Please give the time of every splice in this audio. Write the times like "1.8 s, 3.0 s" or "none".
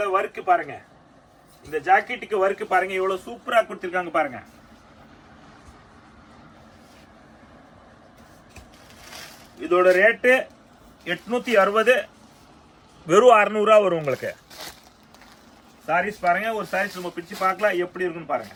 none

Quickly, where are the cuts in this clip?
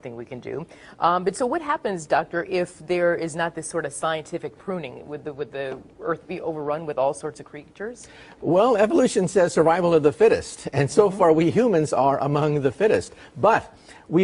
6.2 s

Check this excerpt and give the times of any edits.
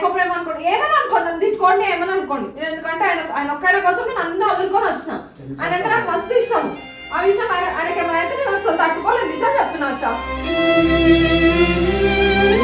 none

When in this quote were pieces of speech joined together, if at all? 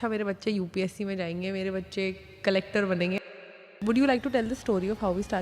3.6 s

